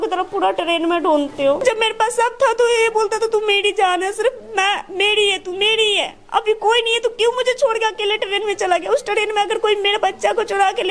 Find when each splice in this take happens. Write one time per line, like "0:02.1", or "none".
0:01.6